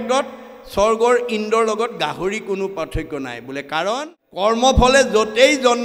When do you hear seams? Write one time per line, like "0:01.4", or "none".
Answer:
0:04.0